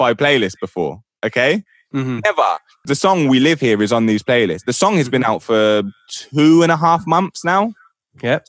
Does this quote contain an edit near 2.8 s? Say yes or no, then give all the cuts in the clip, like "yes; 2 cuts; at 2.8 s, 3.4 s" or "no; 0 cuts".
yes; 1 cut; at 2.8 s